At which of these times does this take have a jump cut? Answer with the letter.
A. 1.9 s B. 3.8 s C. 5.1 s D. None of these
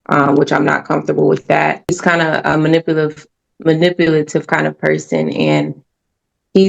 A